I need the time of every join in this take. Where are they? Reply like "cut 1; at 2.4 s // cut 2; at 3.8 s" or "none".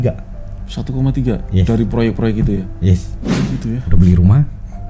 cut 1; at 3.1 s